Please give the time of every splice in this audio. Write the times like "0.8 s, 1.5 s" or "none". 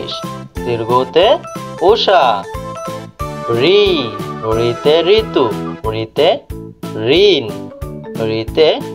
none